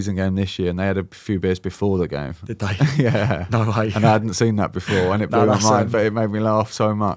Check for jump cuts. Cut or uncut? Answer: uncut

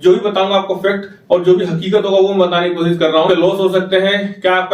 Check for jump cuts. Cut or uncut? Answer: cut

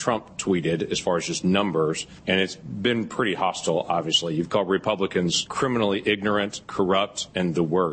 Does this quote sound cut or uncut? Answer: cut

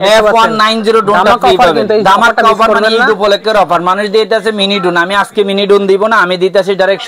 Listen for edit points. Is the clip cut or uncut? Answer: uncut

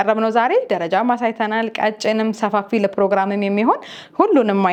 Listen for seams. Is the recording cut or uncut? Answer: uncut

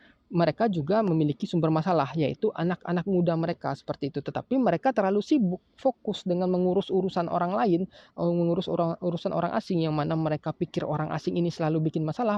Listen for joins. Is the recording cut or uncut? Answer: uncut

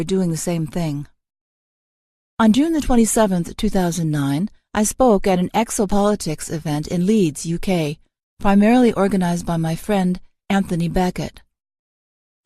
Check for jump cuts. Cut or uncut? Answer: cut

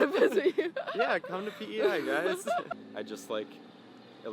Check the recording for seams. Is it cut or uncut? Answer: cut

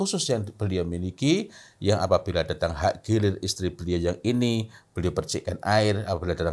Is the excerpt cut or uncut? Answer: uncut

